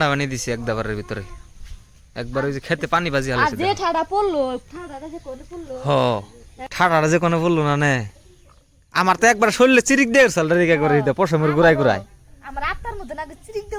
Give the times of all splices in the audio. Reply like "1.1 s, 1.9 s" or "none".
none